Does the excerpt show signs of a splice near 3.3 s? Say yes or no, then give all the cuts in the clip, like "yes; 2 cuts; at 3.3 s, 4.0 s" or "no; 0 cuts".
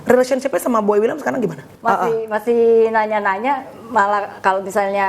no; 1 cut; at 1.7 s